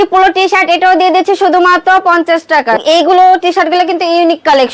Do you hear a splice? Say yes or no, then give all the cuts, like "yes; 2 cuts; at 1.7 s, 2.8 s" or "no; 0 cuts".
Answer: yes; 1 cut; at 2.8 s